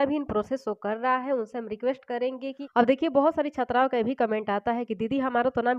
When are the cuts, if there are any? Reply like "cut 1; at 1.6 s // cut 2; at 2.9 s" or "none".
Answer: cut 1; at 2.6 s